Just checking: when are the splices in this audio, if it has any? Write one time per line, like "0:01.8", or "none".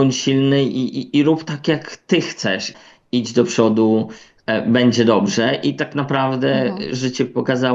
0:02.7

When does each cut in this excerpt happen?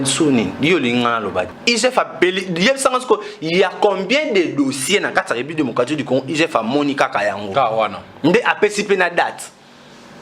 0:01.5

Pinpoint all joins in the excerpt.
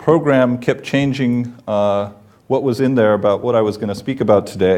none

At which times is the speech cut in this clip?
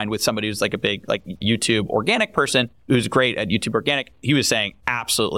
0:01.4
0:02.9
0:04.3

